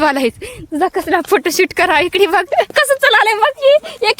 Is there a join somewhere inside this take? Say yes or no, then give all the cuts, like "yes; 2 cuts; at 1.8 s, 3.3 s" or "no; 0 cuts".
yes; 1 cut; at 2.7 s